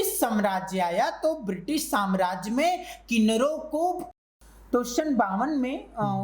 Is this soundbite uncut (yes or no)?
no